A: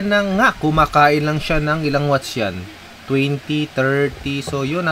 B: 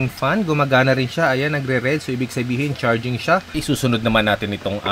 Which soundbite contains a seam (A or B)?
B